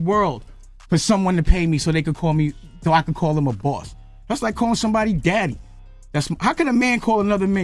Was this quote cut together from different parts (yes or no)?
no